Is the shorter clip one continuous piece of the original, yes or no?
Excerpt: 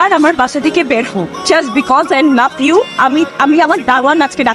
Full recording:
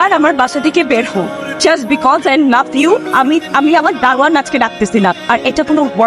no